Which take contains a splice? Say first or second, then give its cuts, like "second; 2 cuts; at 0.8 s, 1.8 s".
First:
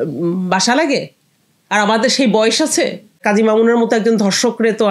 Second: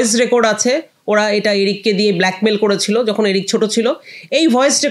first; 1 cut; at 3.2 s